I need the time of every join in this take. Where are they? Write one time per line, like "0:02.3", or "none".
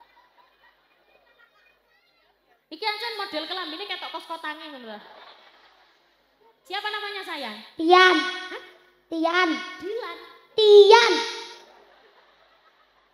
none